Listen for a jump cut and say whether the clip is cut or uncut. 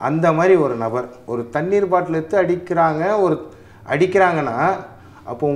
cut